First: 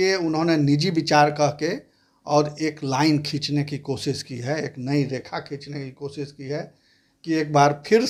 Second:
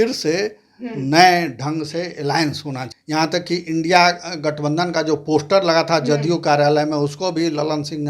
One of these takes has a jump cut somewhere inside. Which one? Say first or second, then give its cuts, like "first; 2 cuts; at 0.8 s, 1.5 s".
second; 1 cut; at 2.8 s